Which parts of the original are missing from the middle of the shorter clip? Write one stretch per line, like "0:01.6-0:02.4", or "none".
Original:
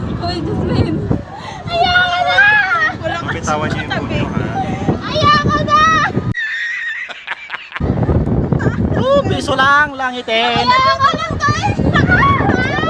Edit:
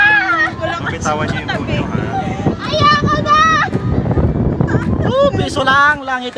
0:06.3-0:07.8